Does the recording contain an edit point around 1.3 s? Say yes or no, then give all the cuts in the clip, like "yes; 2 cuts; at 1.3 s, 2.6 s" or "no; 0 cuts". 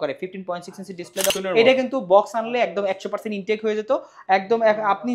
yes; 1 cut; at 1.3 s